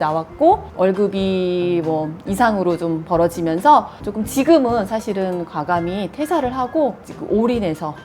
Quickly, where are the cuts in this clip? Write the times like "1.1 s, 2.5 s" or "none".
4.0 s